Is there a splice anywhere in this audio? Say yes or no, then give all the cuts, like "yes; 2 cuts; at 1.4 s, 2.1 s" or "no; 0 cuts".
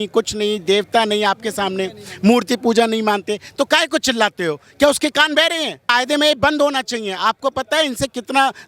yes; 1 cut; at 5.8 s